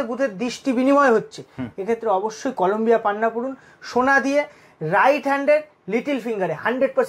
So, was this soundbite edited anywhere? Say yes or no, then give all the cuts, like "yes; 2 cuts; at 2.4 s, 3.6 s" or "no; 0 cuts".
no; 0 cuts